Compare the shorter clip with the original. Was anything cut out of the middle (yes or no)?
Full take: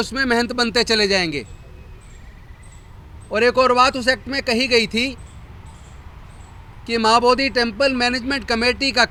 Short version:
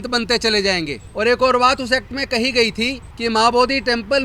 yes